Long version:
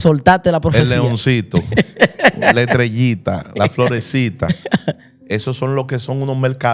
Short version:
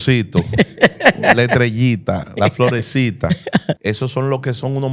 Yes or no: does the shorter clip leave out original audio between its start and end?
yes